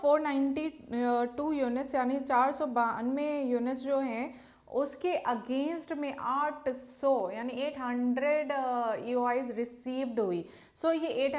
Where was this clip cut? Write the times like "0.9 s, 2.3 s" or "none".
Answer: none